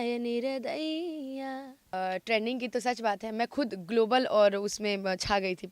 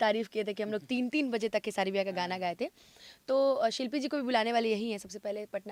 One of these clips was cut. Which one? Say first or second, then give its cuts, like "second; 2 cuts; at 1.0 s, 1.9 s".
first; 1 cut; at 1.9 s